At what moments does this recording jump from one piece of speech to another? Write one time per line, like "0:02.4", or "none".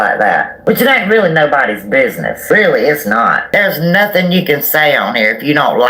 0:03.4